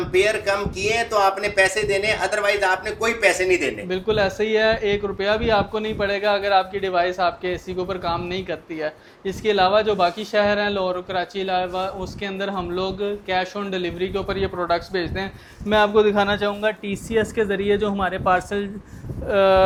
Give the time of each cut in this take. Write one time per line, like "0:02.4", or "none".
none